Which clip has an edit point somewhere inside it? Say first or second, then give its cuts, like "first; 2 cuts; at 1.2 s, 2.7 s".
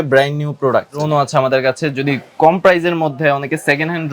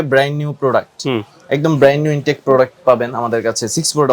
first; 1 cut; at 1.0 s